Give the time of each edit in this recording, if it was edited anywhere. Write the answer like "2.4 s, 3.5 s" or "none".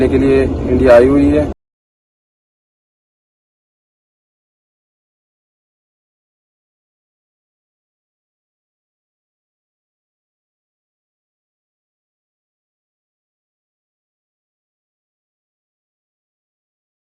none